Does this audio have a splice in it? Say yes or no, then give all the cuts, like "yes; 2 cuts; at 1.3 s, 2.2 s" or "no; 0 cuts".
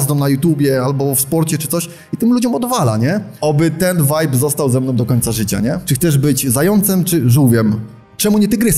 yes; 2 cuts; at 3.3 s, 5.9 s